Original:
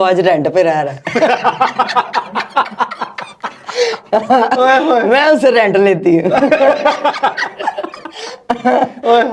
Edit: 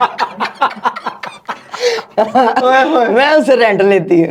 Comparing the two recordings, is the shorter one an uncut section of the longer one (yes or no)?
yes